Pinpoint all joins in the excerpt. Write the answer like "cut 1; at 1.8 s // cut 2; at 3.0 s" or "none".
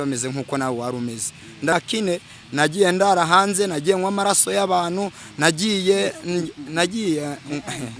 cut 1; at 1.7 s